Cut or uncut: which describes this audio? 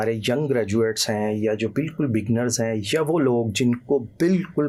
uncut